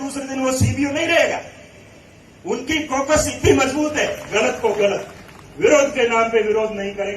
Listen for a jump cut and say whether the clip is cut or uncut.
cut